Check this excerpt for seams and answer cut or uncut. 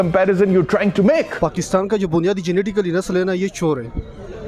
cut